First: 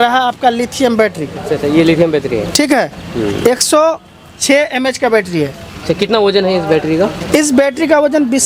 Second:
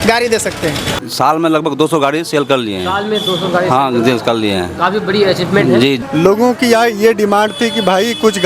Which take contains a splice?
second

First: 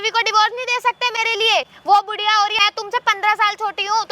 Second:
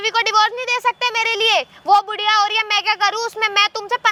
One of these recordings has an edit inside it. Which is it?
first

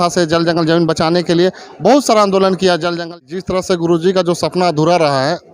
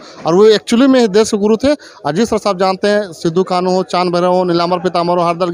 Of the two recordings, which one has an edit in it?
first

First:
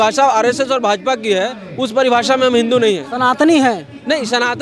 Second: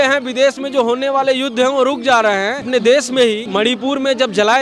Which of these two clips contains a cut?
second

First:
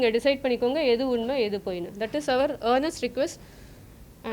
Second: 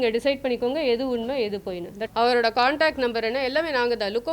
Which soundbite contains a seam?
second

